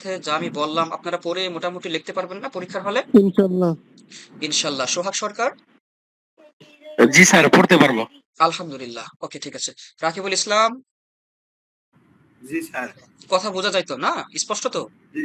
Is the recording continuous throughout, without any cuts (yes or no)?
yes